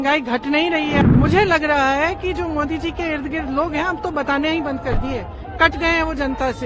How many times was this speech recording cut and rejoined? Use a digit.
1